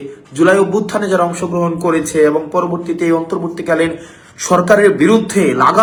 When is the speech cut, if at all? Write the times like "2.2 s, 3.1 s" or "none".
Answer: none